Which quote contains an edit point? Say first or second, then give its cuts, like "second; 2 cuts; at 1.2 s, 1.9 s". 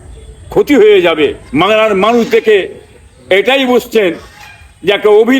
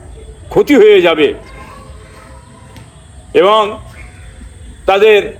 first; 1 cut; at 1.4 s